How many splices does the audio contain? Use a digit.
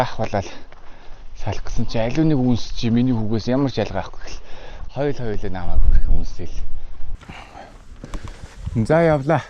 1